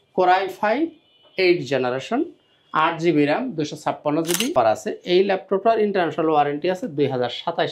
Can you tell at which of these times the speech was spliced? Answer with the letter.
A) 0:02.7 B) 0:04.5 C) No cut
B